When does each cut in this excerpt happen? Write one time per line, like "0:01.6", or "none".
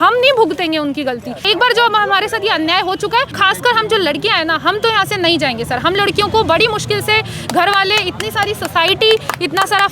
0:01.5
0:03.4